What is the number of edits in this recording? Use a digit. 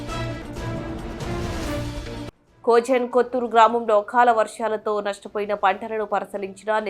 1